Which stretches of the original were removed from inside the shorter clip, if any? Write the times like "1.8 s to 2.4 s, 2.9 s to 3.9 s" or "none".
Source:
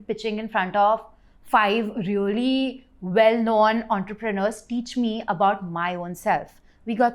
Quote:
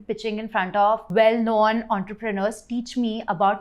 1.1 s to 3.1 s